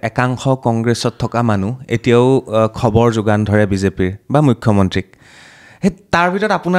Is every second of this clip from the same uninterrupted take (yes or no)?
yes